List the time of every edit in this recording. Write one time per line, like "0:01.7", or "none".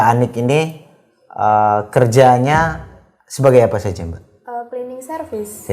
none